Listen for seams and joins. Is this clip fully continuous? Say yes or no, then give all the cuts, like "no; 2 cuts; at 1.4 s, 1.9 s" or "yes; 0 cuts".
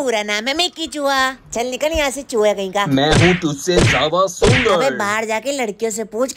yes; 0 cuts